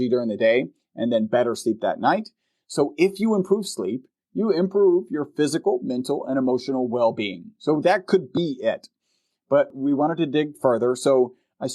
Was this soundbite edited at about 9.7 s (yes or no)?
yes